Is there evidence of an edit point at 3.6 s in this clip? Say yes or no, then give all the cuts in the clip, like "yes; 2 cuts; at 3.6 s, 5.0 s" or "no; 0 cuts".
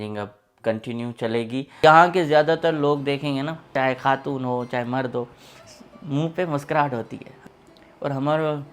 yes; 3 cuts; at 1.7 s, 3.6 s, 7.3 s